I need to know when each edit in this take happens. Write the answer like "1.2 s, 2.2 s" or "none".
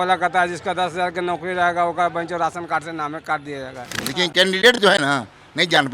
4.0 s

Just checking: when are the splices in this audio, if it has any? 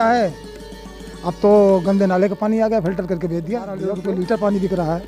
3.9 s

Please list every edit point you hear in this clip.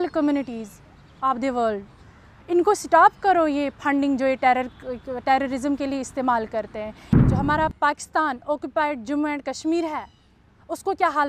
7.0 s

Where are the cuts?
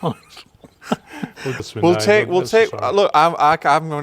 1.6 s

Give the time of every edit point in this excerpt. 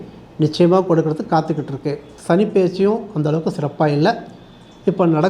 2.1 s

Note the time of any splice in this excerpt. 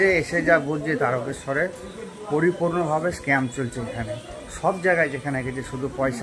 none

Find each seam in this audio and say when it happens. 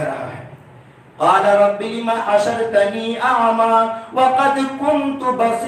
none

